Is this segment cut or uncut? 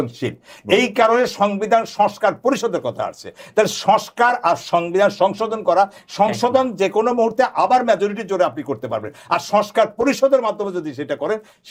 uncut